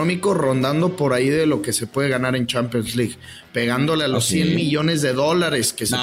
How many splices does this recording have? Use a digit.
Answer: 0